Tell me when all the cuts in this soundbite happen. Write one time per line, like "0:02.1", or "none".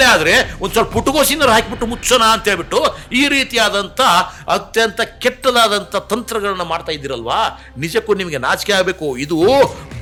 none